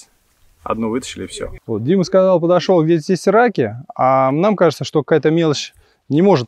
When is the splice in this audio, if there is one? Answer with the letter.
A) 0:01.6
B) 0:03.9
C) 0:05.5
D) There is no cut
A